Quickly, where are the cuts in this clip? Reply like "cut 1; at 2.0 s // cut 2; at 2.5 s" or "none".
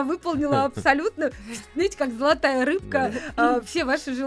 none